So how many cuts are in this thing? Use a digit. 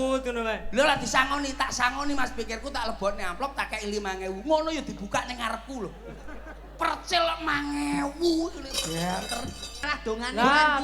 1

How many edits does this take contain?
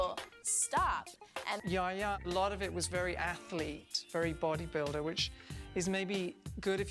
1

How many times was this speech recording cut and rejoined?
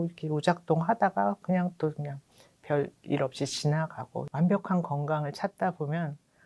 1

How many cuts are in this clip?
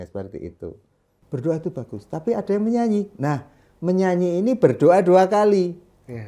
1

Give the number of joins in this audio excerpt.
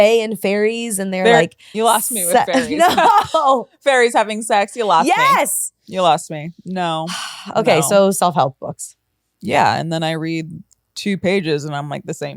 0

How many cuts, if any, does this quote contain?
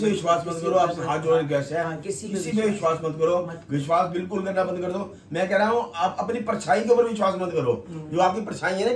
0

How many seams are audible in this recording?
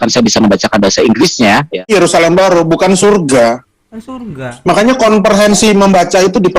1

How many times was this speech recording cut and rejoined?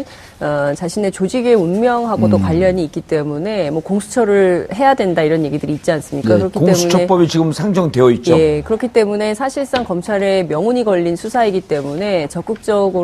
0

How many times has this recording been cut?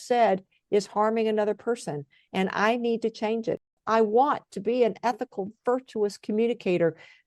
1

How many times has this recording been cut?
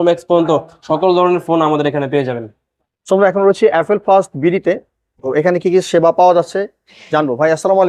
0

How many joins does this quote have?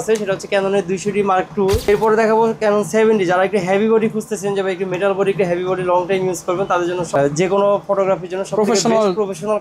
2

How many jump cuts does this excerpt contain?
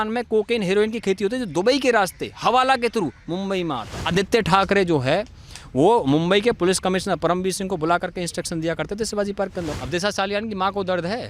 2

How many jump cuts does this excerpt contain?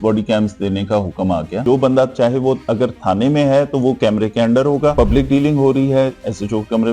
2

